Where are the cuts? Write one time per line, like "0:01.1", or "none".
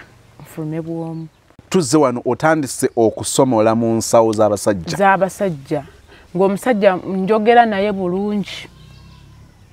0:01.7